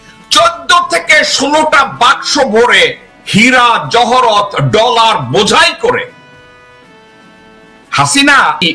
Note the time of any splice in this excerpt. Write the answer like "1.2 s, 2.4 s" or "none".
6.5 s, 7.9 s